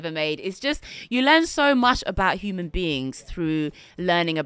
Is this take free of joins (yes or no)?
yes